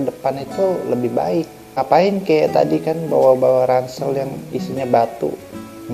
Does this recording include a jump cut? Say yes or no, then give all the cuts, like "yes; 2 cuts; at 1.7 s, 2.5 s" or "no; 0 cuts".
yes; 1 cut; at 1.7 s